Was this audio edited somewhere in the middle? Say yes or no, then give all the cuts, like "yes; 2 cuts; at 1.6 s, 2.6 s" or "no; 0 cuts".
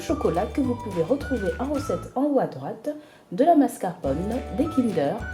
no; 0 cuts